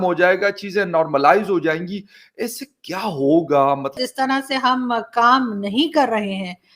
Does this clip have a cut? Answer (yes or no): yes